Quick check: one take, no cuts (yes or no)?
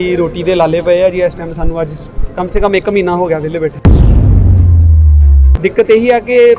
no